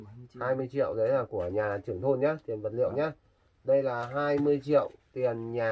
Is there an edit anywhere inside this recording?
no; 0 cuts

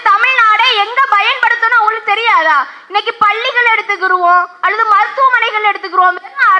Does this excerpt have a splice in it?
no; 0 cuts

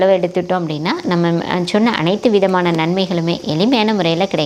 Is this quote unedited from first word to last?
yes; 0 cuts

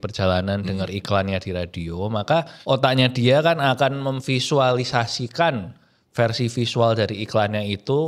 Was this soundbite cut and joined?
yes; 1 cut; at 2.5 s

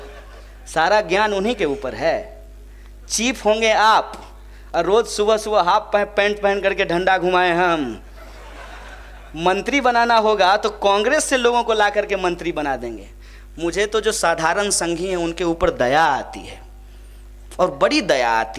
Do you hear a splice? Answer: no; 0 cuts

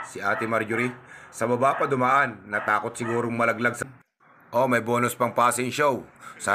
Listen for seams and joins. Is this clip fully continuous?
no; 1 cut; at 3.8 s

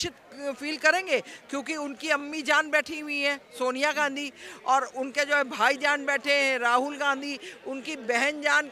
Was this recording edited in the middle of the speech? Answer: no; 0 cuts

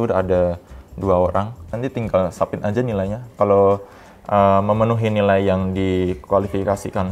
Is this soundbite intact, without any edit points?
no; 1 cut; at 1.7 s

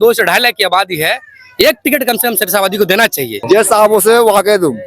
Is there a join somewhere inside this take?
yes; 1 cut; at 3.4 s

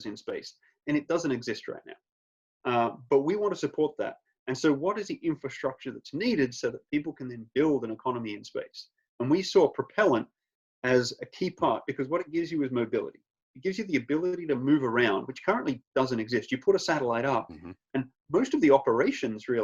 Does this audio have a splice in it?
no; 0 cuts

